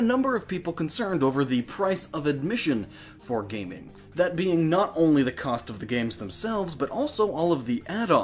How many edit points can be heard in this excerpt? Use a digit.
1